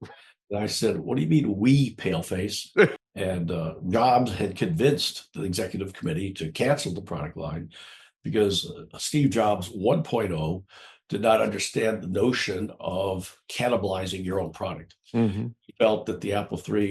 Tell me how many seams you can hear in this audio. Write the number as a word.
one